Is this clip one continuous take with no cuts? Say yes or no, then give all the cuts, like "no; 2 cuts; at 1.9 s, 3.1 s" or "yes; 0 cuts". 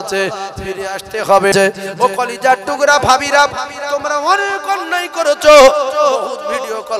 no; 1 cut; at 1.5 s